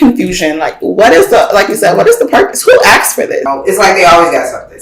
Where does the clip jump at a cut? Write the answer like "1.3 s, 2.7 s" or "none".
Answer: 3.5 s